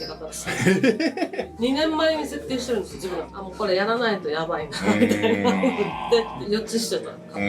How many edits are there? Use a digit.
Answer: 2